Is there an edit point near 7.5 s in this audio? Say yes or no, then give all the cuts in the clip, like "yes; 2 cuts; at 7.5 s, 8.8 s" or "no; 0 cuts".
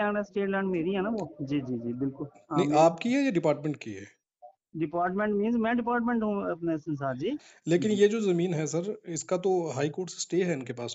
yes; 1 cut; at 7.5 s